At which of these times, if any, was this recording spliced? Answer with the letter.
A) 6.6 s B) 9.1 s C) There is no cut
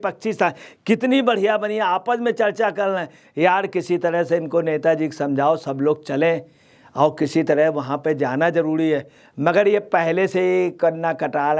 C